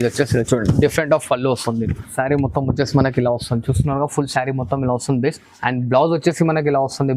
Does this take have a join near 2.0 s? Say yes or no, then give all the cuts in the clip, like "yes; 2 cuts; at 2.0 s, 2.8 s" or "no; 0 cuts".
yes; 1 cut; at 2.0 s